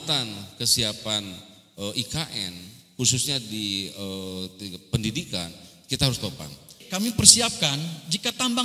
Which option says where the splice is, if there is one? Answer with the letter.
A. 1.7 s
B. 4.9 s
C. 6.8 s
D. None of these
C